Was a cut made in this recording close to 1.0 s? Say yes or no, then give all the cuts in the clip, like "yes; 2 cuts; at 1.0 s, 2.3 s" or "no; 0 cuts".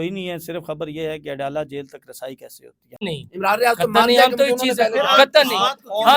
no; 1 cut; at 3.0 s